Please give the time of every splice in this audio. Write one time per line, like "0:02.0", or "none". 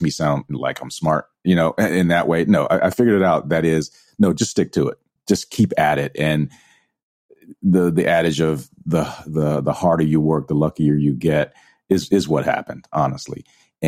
0:05.1